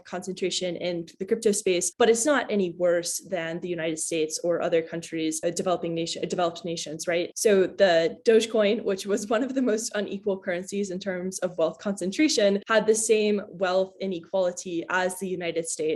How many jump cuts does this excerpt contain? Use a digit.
0